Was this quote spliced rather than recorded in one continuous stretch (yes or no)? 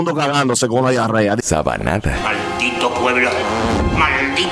yes